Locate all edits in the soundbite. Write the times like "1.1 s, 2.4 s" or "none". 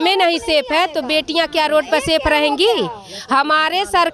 none